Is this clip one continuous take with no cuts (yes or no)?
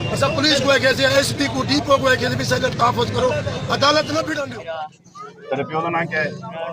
no